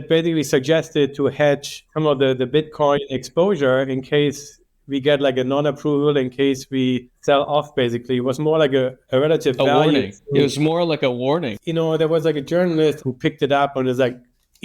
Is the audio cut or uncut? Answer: cut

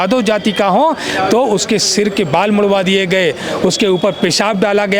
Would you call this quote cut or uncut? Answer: uncut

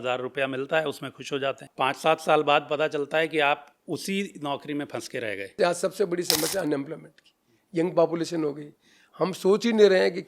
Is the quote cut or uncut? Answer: cut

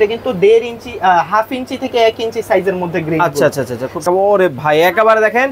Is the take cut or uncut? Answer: cut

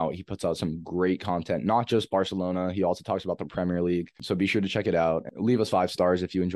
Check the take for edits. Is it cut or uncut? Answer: cut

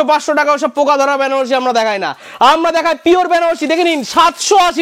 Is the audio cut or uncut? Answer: uncut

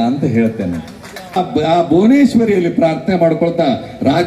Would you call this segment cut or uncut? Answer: cut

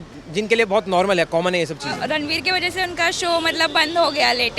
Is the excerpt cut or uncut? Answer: cut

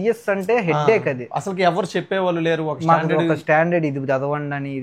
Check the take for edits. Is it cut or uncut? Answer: uncut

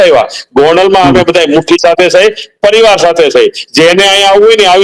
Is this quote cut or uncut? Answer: uncut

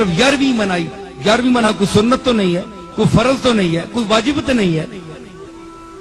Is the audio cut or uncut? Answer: cut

